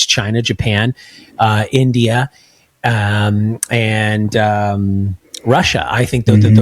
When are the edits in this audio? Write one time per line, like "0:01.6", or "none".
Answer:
none